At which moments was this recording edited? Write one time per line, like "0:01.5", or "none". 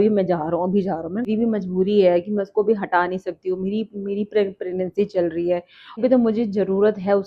0:01.3
0:06.0